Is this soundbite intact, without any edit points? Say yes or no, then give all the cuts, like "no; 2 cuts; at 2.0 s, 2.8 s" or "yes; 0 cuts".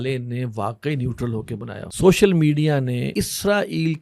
no; 2 cuts; at 1.8 s, 3.1 s